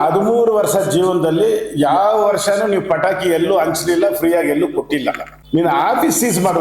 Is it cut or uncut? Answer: cut